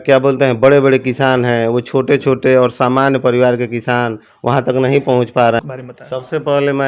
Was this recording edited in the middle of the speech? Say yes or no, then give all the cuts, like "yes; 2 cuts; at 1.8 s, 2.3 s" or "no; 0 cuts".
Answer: yes; 1 cut; at 5.6 s